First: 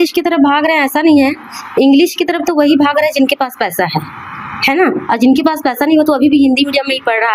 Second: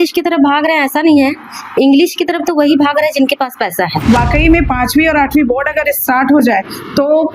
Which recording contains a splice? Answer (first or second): second